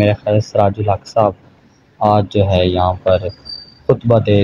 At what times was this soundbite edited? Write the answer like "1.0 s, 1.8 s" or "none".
none